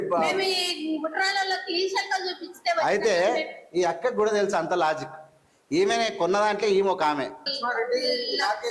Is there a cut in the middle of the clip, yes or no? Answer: yes